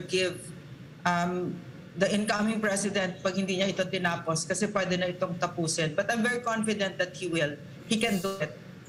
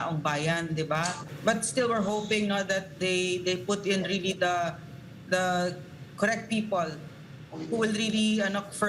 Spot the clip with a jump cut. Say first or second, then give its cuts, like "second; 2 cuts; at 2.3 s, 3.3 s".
second; 1 cut; at 1.3 s